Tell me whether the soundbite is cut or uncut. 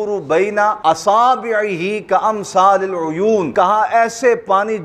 cut